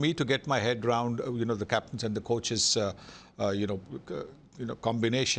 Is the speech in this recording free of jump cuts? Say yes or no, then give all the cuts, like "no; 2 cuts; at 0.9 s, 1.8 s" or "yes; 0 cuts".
yes; 0 cuts